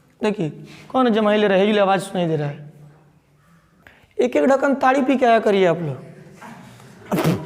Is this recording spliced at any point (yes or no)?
yes